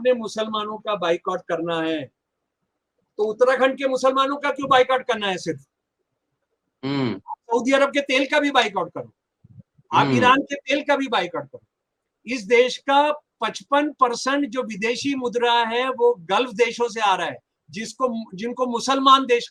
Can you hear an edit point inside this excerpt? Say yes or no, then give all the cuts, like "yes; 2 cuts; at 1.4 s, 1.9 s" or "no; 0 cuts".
no; 0 cuts